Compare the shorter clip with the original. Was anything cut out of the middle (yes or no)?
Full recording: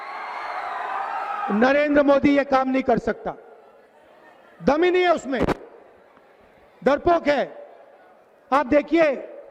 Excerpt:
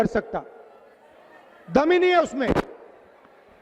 no